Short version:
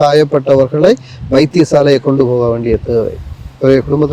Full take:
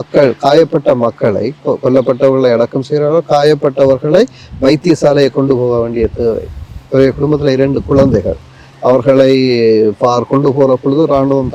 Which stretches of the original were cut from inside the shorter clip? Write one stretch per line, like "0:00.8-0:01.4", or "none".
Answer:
none